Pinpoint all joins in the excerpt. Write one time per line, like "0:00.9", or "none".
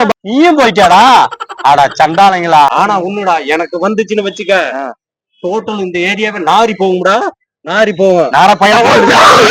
0:02.7